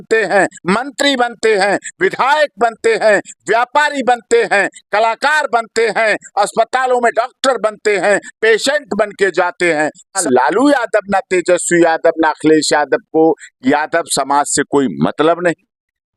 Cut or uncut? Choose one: cut